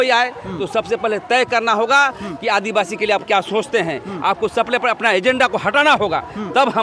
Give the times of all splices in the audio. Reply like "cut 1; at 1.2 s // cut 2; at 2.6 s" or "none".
none